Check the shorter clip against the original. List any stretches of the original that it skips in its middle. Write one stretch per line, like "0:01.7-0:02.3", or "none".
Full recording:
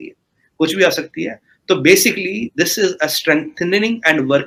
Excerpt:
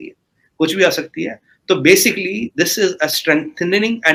none